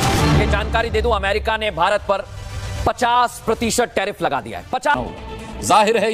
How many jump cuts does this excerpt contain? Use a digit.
1